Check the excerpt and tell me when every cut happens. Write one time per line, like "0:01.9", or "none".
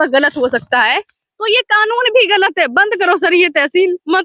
none